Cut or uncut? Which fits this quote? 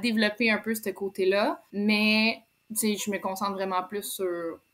cut